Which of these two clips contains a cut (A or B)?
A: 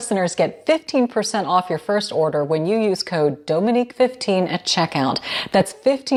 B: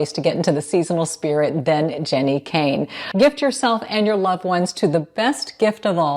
B